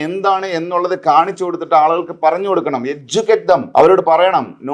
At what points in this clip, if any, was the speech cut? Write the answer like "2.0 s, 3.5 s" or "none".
3.7 s